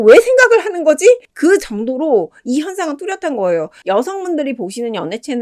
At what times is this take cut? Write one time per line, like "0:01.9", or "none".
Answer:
0:01.3
0:03.8